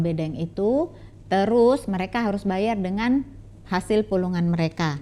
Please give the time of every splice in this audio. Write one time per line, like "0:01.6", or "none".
none